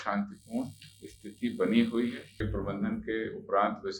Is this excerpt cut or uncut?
cut